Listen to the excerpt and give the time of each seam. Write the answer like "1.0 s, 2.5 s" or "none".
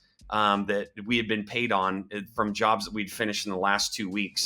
none